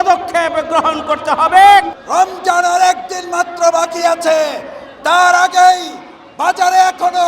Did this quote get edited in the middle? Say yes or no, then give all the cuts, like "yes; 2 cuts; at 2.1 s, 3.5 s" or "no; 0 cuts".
yes; 1 cut; at 2.0 s